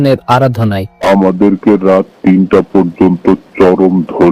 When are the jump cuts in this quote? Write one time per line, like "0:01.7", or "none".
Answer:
0:01.1